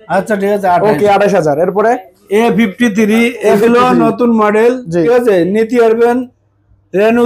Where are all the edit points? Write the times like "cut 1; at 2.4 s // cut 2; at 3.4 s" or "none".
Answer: cut 1; at 2.1 s // cut 2; at 5.1 s